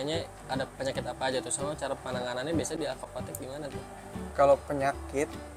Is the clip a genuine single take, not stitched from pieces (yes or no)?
yes